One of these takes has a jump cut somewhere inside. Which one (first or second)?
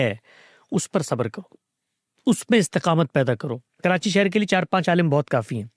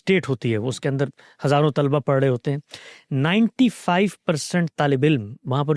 first